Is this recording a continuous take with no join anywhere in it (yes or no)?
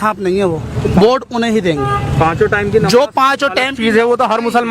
yes